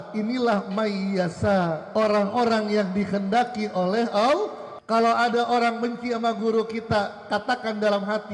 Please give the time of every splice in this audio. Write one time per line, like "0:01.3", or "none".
0:01.8
0:04.7